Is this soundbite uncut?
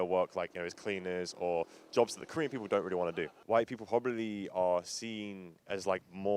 yes; 0 cuts

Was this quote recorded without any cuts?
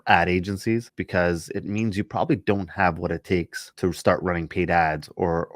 no; 2 cuts; at 1.0 s, 3.6 s

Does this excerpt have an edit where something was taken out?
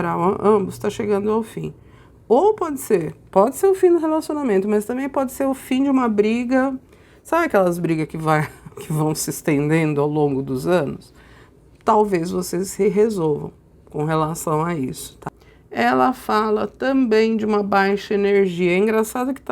yes; 1 cut; at 15.2 s

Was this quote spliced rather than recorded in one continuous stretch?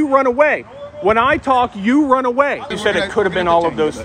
yes; 1 cut; at 2.7 s

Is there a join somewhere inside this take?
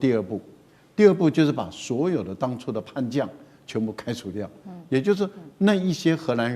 no; 0 cuts

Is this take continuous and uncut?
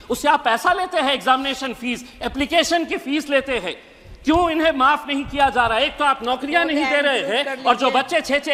yes; 0 cuts

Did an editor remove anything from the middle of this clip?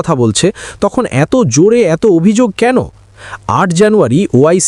no; 0 cuts

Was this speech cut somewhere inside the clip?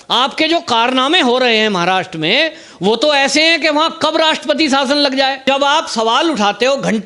yes; 1 cut; at 5.4 s

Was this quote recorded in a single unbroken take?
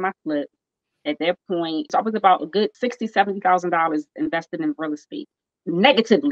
no; 2 cuts; at 1.9 s, 2.7 s

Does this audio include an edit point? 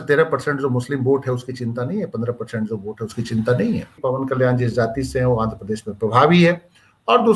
yes; 1 cut; at 3.9 s

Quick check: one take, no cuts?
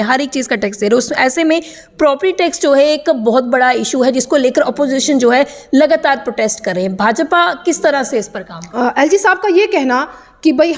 no; 1 cut; at 8.6 s

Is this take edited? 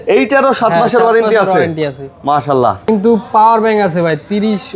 yes; 1 cut; at 2.9 s

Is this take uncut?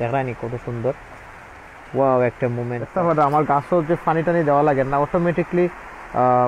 no; 1 cut; at 2.8 s

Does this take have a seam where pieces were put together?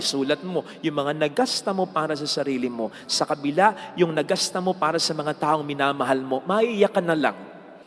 no; 0 cuts

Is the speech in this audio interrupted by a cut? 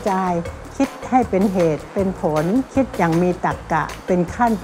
no; 0 cuts

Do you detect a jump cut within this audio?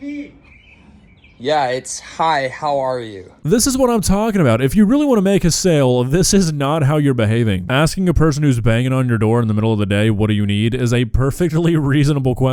no; 0 cuts

